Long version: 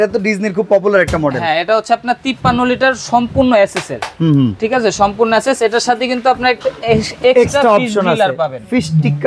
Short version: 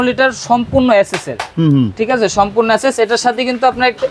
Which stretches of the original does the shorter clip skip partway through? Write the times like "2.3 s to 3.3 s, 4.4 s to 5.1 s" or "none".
none